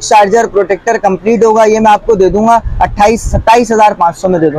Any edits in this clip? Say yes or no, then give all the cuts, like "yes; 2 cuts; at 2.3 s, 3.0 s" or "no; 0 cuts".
no; 0 cuts